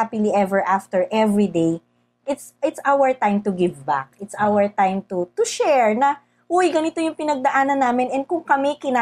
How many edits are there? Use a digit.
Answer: 0